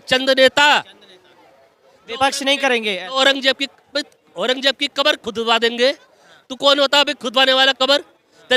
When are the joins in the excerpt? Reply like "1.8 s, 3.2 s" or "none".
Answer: none